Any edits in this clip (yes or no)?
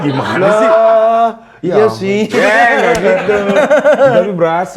no